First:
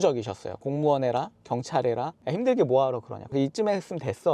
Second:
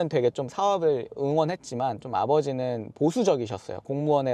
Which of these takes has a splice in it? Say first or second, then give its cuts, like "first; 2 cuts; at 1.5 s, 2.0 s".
first; 2 cuts; at 2.2 s, 3.3 s